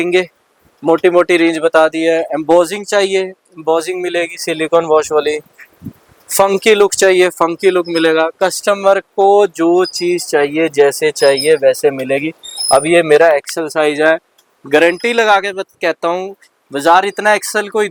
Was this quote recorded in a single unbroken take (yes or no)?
yes